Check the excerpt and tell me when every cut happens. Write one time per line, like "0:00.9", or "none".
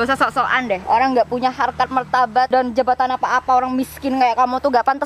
0:00.8
0:02.5